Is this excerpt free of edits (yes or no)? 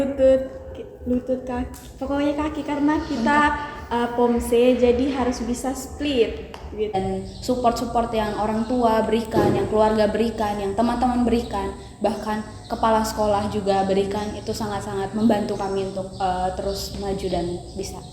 no